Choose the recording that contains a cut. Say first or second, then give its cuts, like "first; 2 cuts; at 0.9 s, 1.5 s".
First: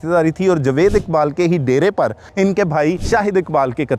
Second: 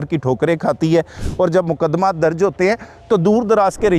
first; 2 cuts; at 2.2 s, 3.0 s